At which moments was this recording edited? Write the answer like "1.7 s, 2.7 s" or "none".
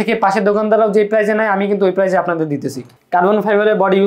2.8 s

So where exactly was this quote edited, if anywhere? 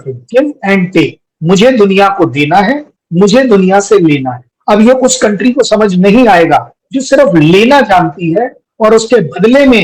8.6 s

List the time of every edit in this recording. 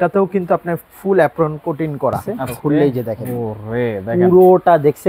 2.3 s

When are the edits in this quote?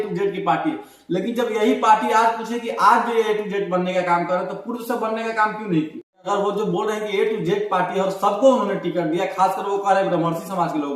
6.3 s

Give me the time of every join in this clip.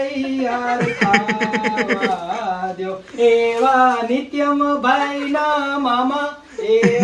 none

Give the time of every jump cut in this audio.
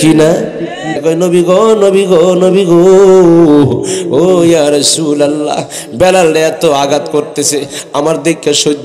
1.0 s

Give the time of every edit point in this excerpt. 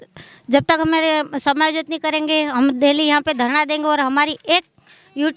none

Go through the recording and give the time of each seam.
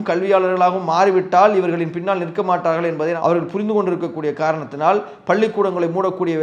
none

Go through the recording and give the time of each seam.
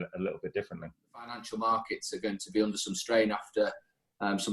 1.4 s

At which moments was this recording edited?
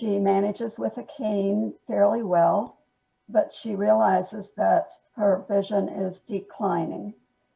5.0 s

